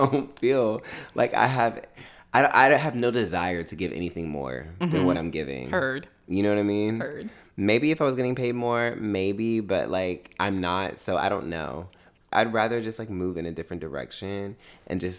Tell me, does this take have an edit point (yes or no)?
yes